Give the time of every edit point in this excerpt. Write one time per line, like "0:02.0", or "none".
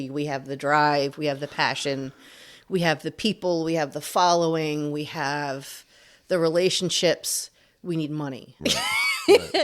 0:08.5